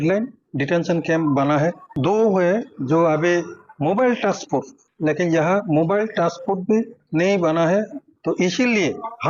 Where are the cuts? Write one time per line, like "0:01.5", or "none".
0:02.7

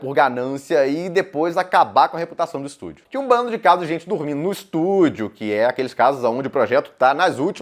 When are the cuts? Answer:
0:03.0

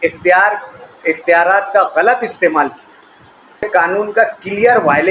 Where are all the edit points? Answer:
0:03.7

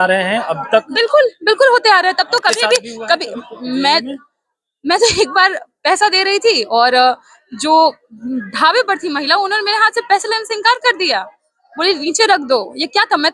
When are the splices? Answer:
none

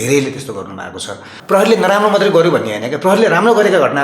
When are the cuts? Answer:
0:01.4

